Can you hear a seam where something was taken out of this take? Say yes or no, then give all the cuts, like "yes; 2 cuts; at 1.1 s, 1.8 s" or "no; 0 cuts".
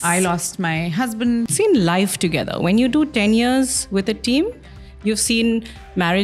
yes; 1 cut; at 1.5 s